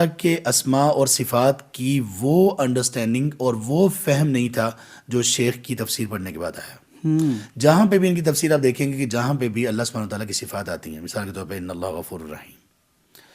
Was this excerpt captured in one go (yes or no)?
yes